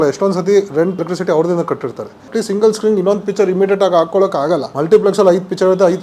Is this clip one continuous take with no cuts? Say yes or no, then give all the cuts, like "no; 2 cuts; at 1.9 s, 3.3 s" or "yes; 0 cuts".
no; 3 cuts; at 1.0 s, 2.2 s, 4.7 s